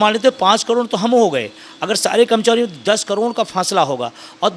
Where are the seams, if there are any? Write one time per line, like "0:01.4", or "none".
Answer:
none

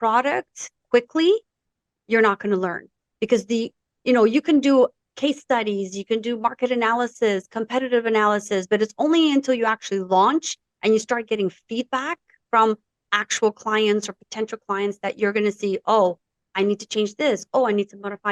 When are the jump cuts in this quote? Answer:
none

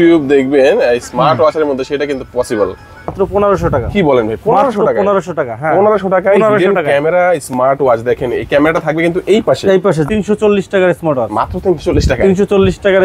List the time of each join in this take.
0:03.1
0:10.1

